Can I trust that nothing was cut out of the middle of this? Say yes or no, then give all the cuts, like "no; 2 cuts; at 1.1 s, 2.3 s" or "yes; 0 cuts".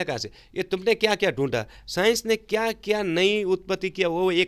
yes; 0 cuts